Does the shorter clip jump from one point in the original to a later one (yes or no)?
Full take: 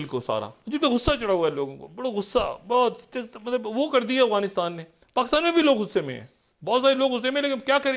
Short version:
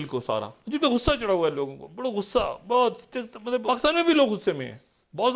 yes